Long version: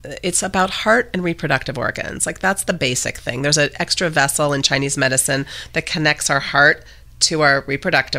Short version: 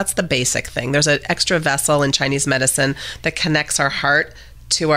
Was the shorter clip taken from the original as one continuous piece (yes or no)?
yes